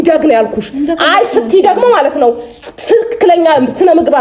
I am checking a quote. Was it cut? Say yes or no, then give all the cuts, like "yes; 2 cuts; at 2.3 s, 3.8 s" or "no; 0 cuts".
no; 0 cuts